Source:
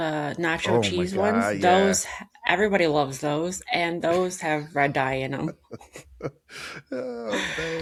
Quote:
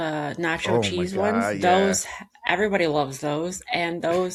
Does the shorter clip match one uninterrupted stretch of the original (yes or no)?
yes